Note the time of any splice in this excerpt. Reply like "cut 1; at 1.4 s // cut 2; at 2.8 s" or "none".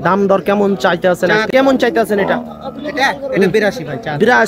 cut 1; at 1.5 s